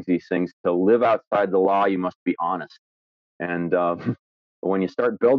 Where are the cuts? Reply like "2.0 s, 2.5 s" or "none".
none